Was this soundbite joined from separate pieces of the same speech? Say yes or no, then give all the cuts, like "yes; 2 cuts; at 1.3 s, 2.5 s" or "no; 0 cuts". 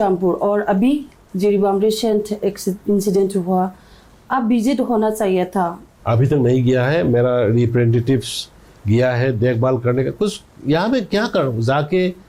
yes; 1 cut; at 5.9 s